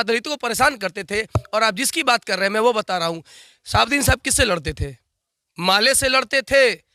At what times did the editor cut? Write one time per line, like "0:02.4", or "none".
none